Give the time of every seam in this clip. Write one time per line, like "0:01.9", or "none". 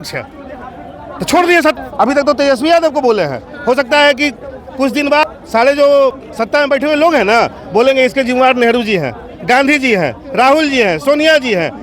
0:01.7
0:05.2
0:06.3